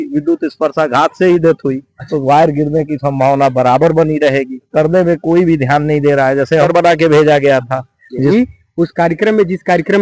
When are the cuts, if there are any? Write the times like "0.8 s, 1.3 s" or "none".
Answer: 2.1 s, 4.6 s, 6.7 s, 8.3 s